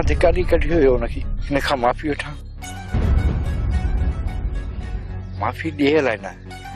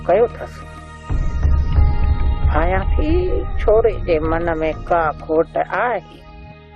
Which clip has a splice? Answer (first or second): second